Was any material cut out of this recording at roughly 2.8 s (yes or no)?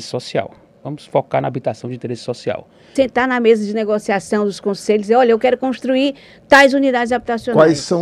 yes